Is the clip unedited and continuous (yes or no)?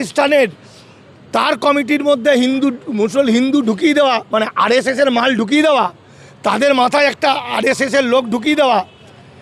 yes